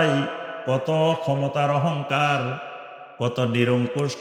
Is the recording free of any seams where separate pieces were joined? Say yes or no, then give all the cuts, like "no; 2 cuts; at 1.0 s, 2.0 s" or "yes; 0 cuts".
yes; 0 cuts